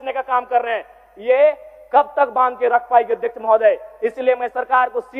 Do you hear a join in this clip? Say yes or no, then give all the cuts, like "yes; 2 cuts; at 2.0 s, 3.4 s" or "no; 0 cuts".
no; 0 cuts